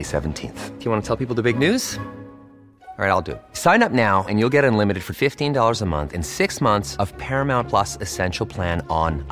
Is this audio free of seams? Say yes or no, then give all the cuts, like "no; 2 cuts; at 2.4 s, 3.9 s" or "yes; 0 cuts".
yes; 0 cuts